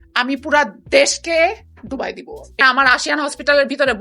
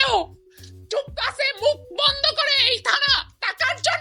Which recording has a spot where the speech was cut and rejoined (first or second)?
first